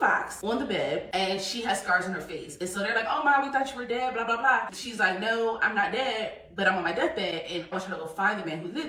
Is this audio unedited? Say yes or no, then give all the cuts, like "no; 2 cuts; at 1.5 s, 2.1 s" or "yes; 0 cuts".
yes; 0 cuts